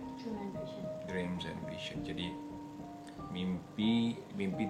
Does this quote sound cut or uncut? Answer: uncut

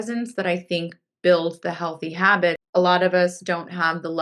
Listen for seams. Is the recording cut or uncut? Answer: cut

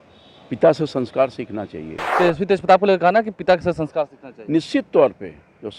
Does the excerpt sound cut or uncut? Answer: cut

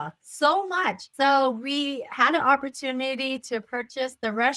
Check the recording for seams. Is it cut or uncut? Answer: uncut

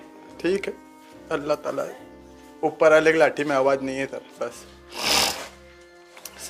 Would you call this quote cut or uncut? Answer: uncut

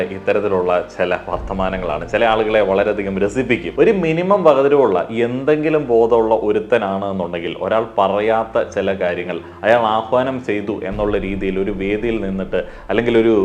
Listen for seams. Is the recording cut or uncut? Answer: cut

